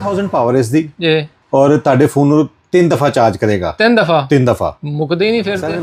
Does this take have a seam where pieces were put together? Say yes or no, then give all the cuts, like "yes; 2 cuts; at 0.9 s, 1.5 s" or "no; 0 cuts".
no; 0 cuts